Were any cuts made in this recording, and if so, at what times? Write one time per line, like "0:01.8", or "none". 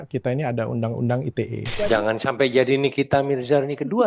0:01.7